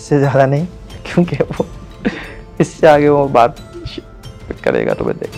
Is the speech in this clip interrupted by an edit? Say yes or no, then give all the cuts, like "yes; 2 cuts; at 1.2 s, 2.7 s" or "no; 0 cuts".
no; 0 cuts